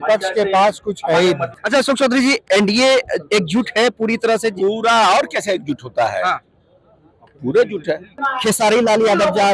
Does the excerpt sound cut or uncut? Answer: cut